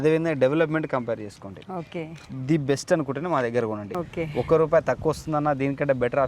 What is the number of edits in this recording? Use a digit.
1